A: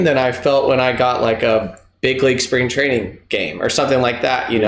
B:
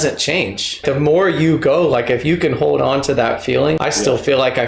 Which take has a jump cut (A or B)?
B